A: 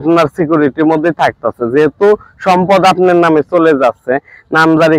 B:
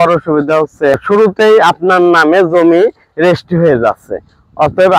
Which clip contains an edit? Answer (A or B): B